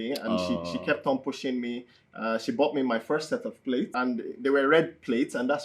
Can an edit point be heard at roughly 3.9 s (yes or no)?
yes